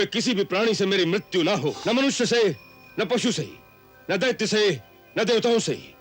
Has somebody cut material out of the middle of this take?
yes; 1 cut; at 1.8 s

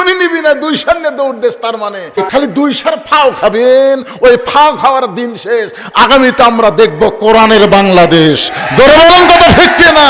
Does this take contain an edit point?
yes; 1 cut; at 2.1 s

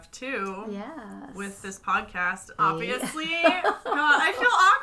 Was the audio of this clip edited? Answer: yes; 1 cut; at 2.6 s

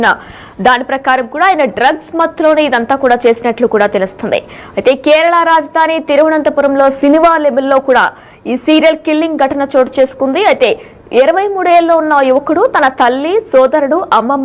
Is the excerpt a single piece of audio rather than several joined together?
yes; 0 cuts

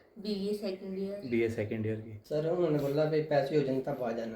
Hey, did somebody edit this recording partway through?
yes; 1 cut; at 2.1 s

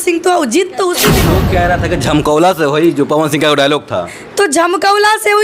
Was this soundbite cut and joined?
yes; 1 cut; at 1.2 s

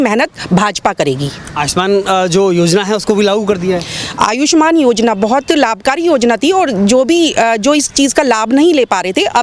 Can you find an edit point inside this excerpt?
no; 0 cuts

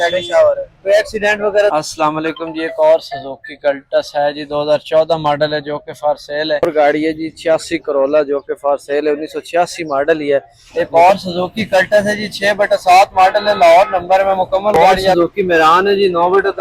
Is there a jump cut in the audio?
yes; 4 cuts; at 1.7 s, 6.6 s, 10.6 s, 15.1 s

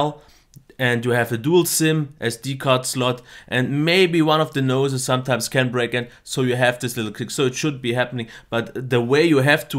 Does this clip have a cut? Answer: no; 0 cuts

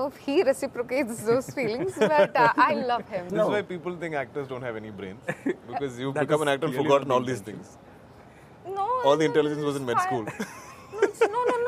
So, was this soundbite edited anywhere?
yes; 1 cut; at 3.3 s

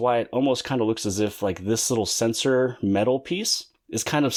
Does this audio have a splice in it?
no; 0 cuts

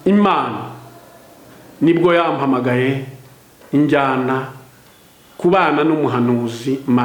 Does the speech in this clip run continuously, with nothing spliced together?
yes; 0 cuts

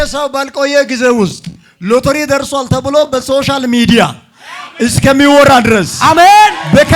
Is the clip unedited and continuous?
yes; 0 cuts

